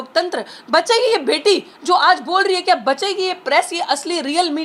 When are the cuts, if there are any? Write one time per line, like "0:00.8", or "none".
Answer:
none